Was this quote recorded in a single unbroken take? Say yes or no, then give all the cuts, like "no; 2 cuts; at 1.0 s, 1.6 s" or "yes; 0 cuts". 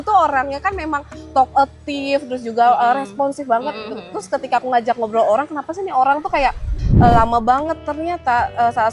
no; 1 cut; at 6.8 s